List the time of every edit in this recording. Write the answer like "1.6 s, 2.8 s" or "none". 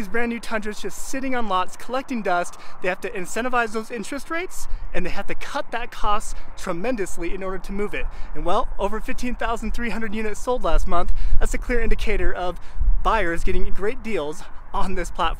none